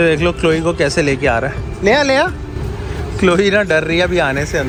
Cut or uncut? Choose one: uncut